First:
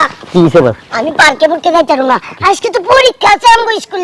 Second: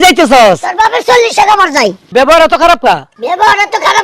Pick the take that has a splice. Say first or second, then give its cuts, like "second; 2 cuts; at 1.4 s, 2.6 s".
second; 2 cuts; at 2.1 s, 3.1 s